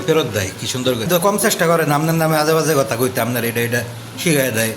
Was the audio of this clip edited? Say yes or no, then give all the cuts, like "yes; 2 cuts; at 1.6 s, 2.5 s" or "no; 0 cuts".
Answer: yes; 1 cut; at 1.1 s